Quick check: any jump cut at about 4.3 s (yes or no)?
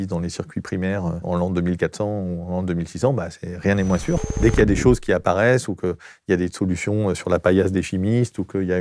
yes